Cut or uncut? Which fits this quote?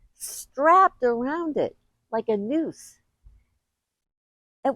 uncut